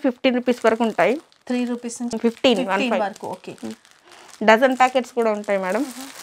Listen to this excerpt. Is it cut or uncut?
uncut